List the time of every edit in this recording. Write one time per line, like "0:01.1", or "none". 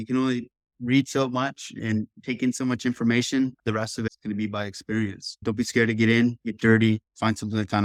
none